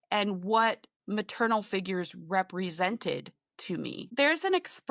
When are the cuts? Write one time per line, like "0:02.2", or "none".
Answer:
0:00.9
0:04.0